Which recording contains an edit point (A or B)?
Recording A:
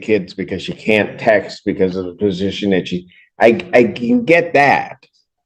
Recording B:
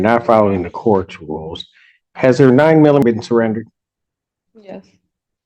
B